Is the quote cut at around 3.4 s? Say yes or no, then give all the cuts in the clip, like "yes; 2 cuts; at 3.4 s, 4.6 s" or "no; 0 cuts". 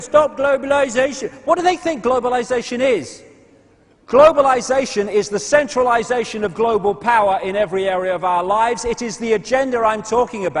yes; 1 cut; at 3.4 s